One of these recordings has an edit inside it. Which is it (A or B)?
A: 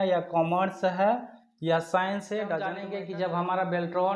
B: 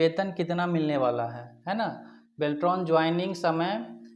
A